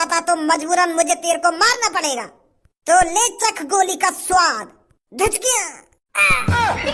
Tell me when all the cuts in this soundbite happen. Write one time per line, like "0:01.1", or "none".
none